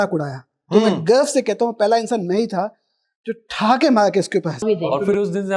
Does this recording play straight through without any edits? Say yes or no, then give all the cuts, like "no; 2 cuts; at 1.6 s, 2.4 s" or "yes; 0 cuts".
no; 1 cut; at 4.6 s